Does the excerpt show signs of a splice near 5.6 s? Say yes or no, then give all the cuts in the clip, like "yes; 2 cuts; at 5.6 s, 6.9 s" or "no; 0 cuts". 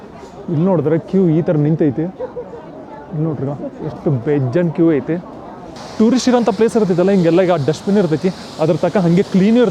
yes; 1 cut; at 5.6 s